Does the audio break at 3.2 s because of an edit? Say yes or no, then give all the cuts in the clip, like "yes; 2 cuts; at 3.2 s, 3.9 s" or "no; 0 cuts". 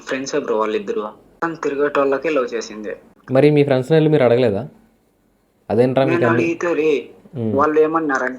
yes; 2 cuts; at 1.4 s, 3.2 s